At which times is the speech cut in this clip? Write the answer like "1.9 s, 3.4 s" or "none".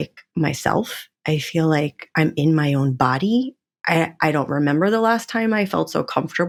none